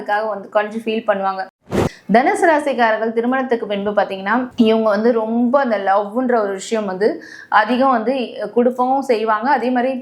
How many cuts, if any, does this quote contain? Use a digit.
1